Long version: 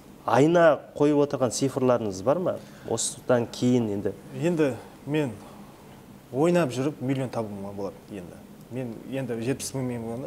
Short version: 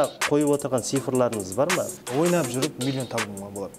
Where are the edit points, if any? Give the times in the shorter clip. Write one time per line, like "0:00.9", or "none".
0:02.0